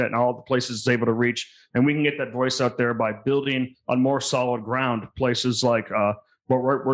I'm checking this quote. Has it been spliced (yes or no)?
no